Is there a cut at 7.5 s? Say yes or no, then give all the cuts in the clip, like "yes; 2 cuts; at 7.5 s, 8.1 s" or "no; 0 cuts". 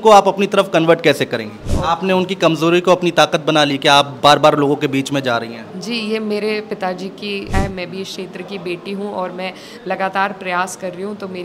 yes; 2 cuts; at 1.6 s, 7.5 s